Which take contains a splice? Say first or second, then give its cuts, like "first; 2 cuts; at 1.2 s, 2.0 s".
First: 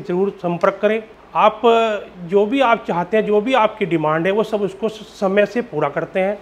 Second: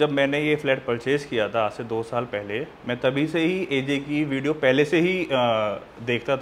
first; 1 cut; at 1.2 s